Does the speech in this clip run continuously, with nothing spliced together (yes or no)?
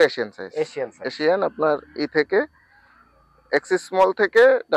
yes